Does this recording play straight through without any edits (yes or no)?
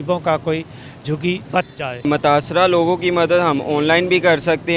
no